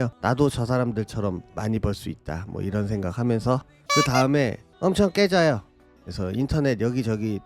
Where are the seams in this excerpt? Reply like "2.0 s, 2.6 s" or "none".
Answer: 5.8 s